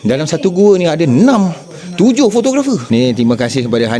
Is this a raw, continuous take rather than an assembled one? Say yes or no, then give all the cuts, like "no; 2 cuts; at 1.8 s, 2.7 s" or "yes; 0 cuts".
no; 1 cut; at 2.8 s